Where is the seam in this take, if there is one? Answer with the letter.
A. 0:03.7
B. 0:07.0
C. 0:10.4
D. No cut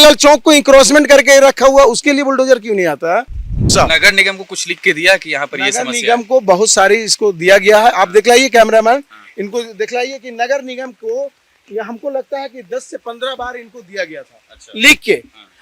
A